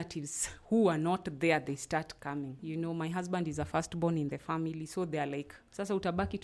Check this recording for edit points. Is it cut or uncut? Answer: cut